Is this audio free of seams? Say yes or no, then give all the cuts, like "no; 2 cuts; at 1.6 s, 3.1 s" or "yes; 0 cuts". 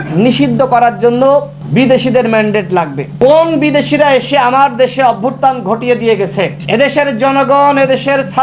yes; 0 cuts